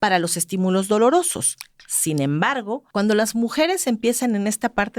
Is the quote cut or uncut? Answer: cut